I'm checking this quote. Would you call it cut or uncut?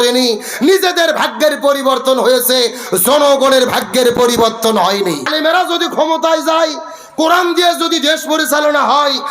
cut